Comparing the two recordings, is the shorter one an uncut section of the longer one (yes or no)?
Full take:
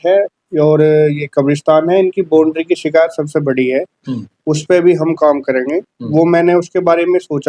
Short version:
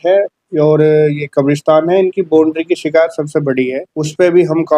no